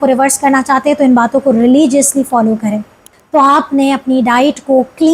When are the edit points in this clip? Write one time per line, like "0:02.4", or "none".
0:03.1